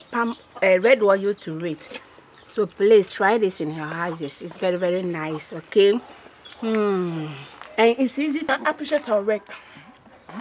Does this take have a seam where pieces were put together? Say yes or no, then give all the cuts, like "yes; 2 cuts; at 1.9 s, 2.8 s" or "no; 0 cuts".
yes; 1 cut; at 8.5 s